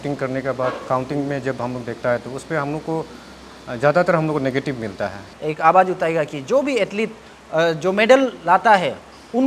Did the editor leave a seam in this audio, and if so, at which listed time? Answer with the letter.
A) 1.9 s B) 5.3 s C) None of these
B